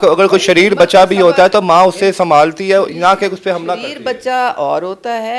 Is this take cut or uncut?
uncut